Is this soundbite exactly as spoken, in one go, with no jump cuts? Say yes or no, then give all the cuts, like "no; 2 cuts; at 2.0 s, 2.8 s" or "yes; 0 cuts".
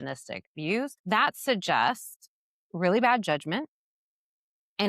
no; 1 cut; at 1.0 s